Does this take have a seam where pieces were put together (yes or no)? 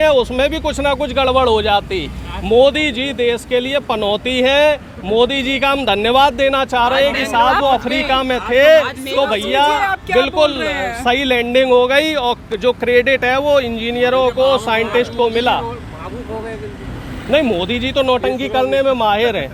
no